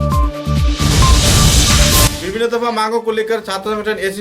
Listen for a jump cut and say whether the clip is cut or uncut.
cut